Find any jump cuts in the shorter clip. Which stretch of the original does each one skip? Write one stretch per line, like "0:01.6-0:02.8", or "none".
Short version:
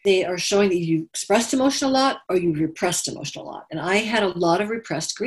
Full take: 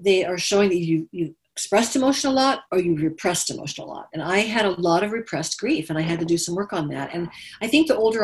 0:01.1-0:01.5